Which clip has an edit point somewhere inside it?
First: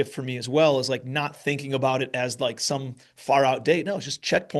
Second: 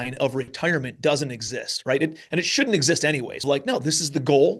second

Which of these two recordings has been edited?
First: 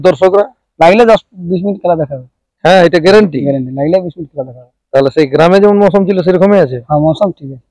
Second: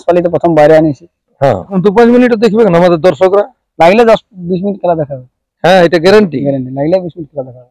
second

